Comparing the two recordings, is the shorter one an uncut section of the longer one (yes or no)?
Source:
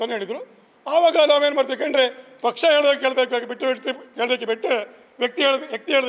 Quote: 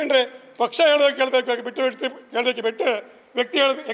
yes